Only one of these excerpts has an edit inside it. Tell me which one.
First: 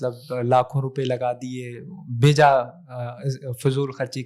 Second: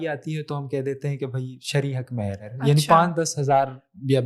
second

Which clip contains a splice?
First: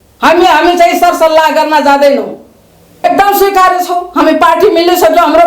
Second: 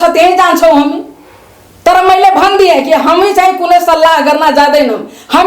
first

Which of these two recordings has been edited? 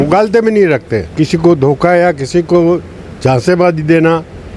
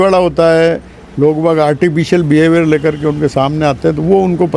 first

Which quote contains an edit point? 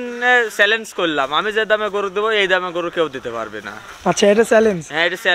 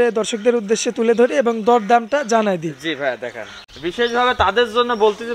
second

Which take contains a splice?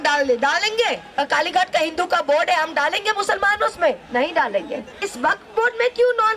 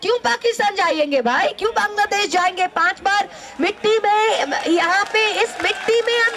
first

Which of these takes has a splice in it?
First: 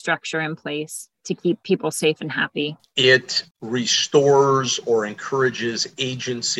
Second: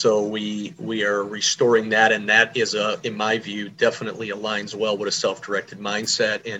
first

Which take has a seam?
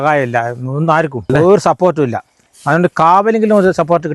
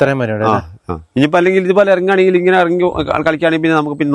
first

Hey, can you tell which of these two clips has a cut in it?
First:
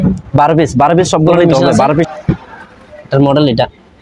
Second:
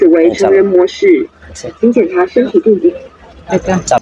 first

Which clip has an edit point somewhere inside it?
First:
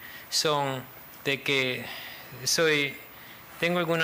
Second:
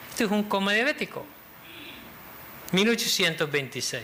first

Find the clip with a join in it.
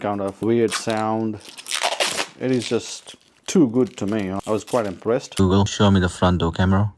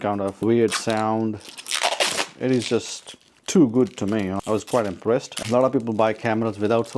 first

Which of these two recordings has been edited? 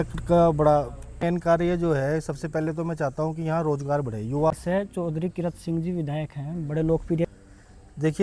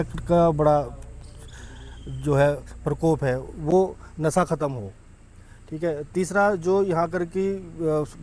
first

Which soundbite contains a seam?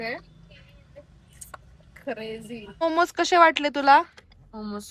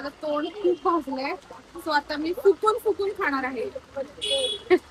first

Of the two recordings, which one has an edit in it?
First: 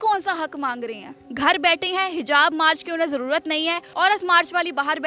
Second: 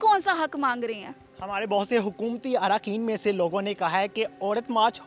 first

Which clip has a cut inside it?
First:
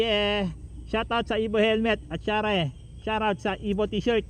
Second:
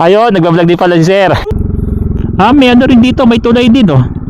second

